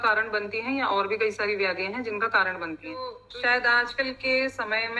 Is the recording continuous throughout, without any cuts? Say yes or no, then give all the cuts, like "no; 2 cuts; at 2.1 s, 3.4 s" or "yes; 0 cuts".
no; 1 cut; at 3.2 s